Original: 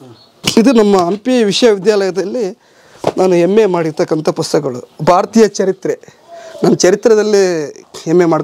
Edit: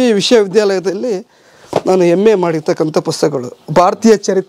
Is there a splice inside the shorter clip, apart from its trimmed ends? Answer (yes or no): no